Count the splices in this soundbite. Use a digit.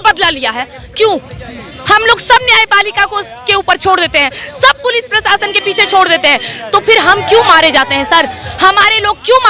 0